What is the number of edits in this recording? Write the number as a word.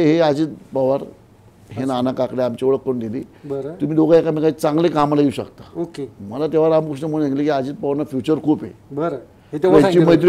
zero